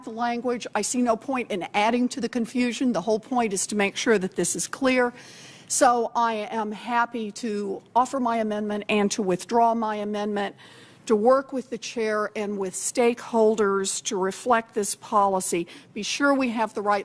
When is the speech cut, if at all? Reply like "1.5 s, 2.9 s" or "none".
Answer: 8.5 s